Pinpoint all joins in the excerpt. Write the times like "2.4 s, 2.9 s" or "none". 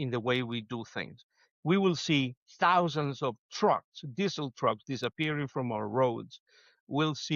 none

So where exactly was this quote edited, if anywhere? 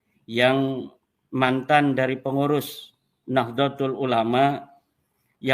none

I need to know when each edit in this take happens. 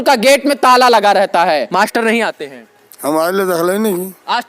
1.7 s

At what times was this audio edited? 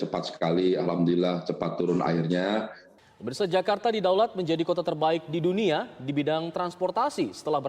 3.2 s

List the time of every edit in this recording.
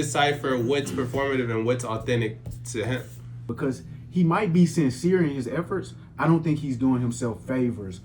3.5 s

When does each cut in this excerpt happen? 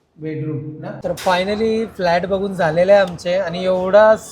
1.0 s

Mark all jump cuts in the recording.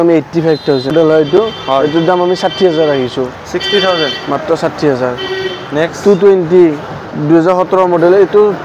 0.9 s

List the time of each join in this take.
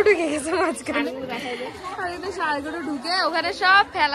none

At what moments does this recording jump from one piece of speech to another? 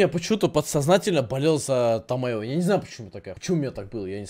3.3 s

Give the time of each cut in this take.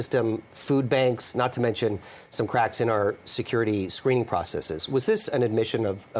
none

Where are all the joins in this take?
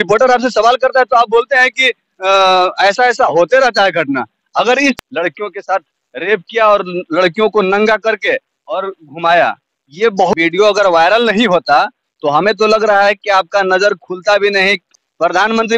5.0 s, 10.3 s, 14.9 s

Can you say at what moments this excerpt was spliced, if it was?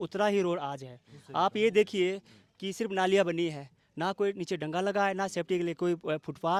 none

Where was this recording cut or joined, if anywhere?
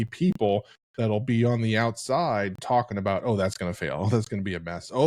none

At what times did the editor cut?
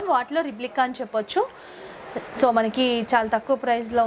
none

